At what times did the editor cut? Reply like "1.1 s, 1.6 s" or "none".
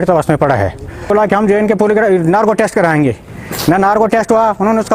1.1 s